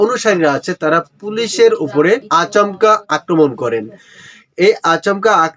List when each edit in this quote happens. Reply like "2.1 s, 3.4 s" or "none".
2.6 s